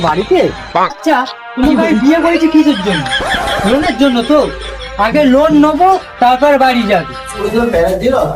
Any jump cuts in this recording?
yes; 1 cut; at 7.4 s

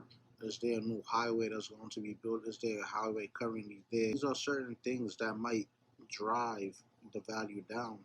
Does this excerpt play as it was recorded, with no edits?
no; 1 cut; at 4.2 s

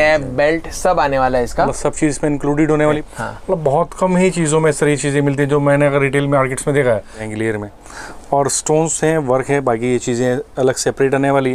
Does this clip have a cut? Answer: yes; 2 cuts; at 3.0 s, 7.2 s

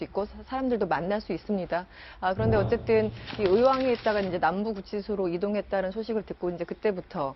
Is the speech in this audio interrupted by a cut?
no; 0 cuts

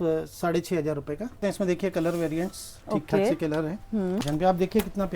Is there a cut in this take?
yes; 2 cuts; at 1.4 s, 4.2 s

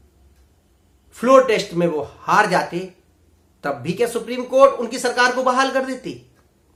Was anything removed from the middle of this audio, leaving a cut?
no; 0 cuts

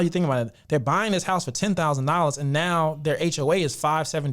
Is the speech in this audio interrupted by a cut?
no; 0 cuts

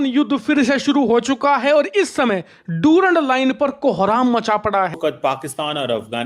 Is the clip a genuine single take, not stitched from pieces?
no; 1 cut; at 4.9 s

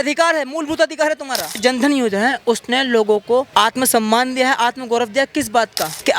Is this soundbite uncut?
no; 1 cut; at 1.5 s

